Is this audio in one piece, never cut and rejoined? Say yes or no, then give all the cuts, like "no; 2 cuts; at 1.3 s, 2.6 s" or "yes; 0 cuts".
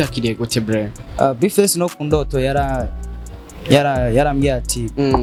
yes; 0 cuts